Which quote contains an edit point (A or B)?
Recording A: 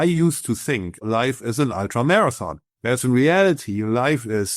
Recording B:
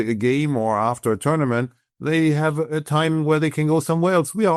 A